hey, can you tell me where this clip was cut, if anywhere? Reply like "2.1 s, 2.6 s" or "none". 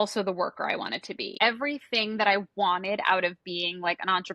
1.2 s